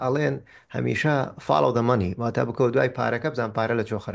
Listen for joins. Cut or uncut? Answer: uncut